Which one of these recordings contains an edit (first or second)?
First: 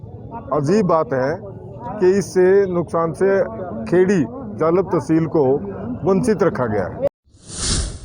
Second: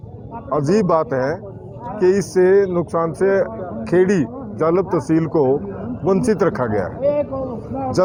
first